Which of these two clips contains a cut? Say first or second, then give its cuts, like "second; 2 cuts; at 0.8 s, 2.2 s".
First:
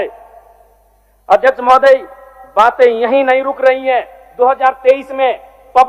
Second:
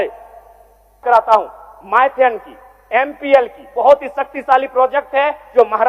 second; 1 cut; at 1.0 s